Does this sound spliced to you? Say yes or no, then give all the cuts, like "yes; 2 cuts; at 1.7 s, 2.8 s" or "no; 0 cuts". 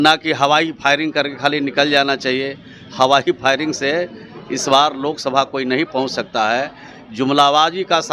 no; 0 cuts